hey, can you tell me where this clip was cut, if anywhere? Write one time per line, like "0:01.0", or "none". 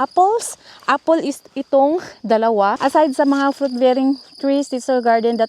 0:02.8